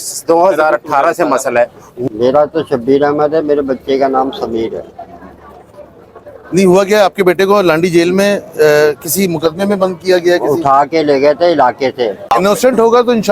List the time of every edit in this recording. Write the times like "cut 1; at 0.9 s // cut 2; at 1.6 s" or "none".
cut 1; at 1.9 s // cut 2; at 12.2 s